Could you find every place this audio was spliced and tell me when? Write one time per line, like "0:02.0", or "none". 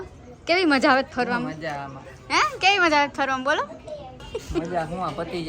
0:04.3